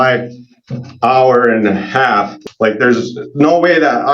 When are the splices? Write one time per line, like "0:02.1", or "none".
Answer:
0:02.4